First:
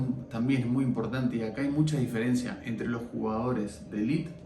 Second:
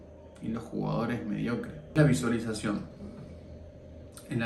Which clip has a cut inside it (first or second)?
second